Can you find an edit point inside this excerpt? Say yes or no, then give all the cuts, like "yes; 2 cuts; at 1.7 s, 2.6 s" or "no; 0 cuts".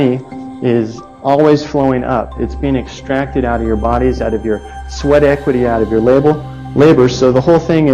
no; 0 cuts